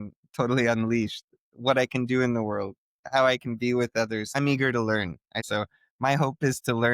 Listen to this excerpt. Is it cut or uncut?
cut